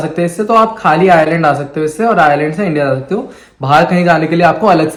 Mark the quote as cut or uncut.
uncut